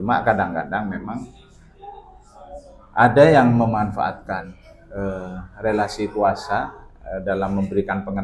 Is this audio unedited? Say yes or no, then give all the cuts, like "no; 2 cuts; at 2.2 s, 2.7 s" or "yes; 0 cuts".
yes; 0 cuts